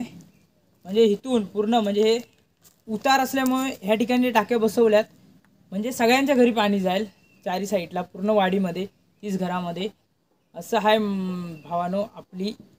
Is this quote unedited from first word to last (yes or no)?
yes